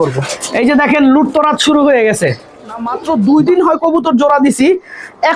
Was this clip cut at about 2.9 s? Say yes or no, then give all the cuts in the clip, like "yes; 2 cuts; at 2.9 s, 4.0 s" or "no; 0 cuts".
yes; 1 cut; at 2.9 s